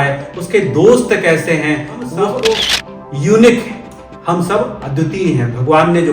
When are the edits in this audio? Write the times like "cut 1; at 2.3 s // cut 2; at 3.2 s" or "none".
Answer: cut 1; at 2.8 s